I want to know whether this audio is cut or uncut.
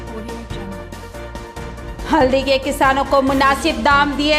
cut